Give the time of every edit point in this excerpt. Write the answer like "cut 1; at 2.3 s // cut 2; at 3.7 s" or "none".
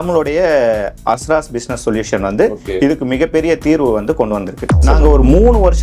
cut 1; at 4.9 s